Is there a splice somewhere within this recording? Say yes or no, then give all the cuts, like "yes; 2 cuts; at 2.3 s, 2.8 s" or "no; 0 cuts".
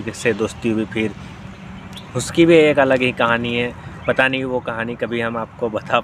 no; 0 cuts